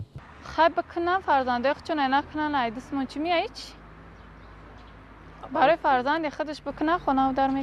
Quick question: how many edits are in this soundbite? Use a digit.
0